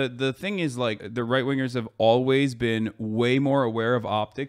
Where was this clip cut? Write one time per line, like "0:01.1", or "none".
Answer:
0:01.0